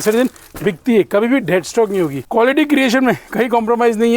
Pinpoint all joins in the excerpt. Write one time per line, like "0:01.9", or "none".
0:02.2